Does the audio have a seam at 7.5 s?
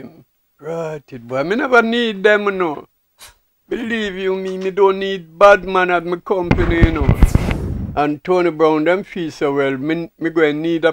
yes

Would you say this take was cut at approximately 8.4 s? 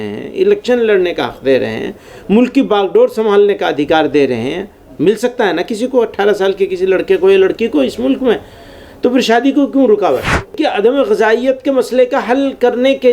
no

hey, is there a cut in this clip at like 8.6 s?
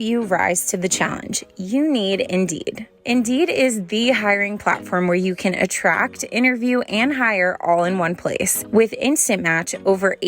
yes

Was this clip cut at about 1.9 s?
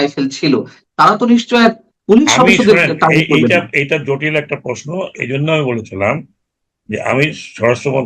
yes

